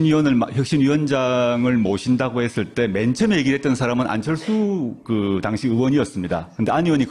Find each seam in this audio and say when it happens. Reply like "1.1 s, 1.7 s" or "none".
none